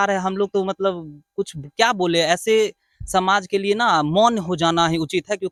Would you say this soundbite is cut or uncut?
uncut